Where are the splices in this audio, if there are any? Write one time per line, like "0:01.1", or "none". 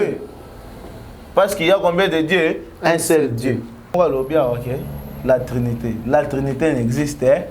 0:04.0

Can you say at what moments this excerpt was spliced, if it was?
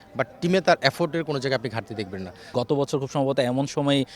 0:02.4

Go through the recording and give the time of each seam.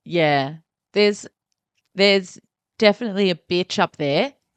none

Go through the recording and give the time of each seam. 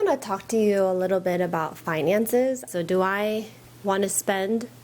0:02.7

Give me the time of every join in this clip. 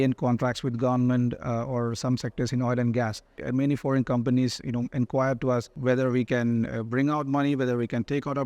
0:03.4
0:05.7

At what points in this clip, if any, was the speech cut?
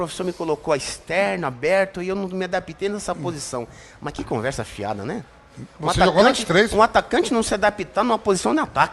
none

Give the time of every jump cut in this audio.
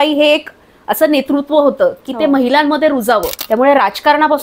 0:03.3

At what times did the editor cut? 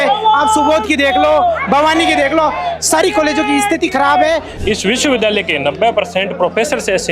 0:04.5

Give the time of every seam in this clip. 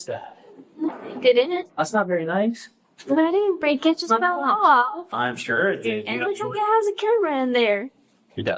none

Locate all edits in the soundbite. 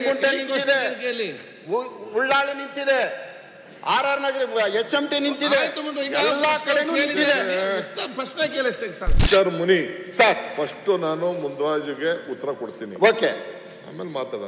0:09.2

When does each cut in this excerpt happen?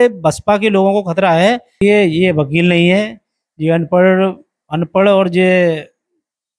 0:01.8

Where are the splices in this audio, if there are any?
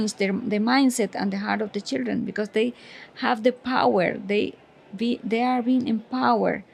none

